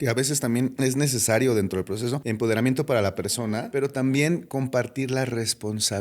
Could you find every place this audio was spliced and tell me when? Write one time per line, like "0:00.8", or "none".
0:00.8
0:02.2
0:03.7